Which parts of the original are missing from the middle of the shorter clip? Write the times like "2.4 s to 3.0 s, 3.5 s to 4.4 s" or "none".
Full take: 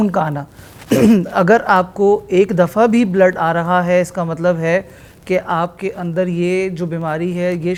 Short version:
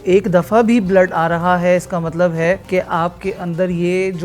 4.9 s to 5.2 s